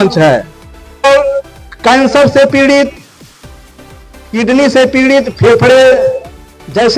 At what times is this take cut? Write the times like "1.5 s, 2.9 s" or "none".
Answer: 1.0 s